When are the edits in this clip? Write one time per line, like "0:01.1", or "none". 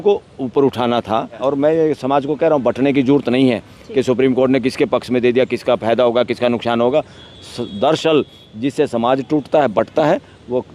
0:01.4